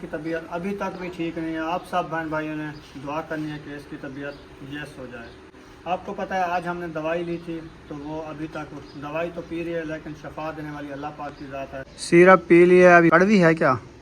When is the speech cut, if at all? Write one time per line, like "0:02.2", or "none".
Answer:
0:11.9
0:13.1